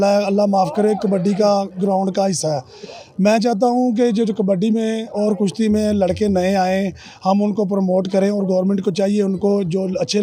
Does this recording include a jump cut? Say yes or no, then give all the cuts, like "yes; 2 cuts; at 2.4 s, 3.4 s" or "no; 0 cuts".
no; 0 cuts